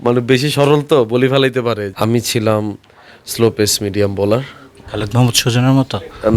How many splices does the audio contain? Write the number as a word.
one